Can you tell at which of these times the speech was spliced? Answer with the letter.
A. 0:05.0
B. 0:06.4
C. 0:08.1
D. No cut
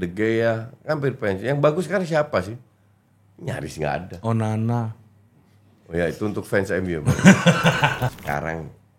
C